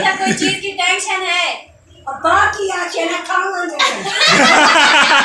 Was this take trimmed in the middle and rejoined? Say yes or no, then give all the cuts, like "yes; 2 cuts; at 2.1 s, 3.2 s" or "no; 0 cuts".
no; 0 cuts